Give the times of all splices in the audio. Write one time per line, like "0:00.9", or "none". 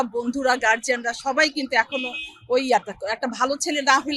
none